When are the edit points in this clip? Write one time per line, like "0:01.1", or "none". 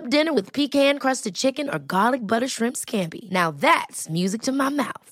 none